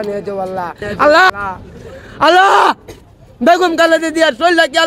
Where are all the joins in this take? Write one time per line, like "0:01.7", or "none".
0:01.3